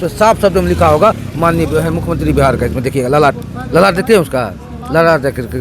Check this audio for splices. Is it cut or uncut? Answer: uncut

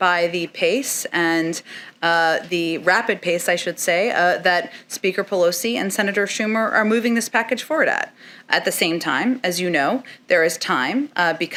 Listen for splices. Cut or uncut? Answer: uncut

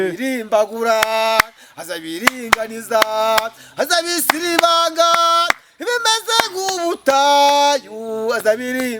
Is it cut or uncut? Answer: uncut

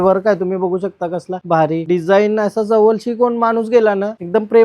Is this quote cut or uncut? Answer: uncut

